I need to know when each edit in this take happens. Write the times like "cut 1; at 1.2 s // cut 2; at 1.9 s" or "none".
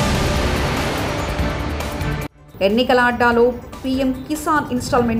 none